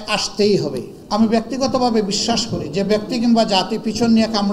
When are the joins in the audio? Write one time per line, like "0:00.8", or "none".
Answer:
0:00.9